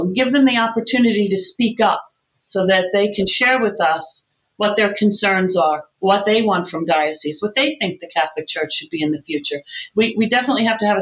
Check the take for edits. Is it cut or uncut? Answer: uncut